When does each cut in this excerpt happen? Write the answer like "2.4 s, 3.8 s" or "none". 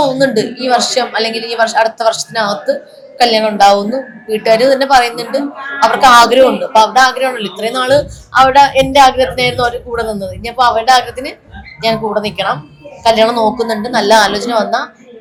none